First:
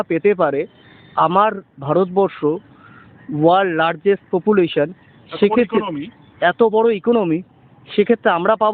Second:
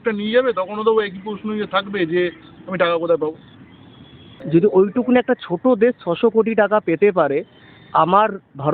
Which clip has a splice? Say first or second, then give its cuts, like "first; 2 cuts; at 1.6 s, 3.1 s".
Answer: second; 1 cut; at 4.2 s